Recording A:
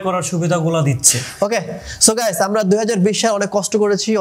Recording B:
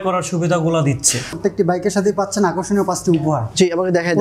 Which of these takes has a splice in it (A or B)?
B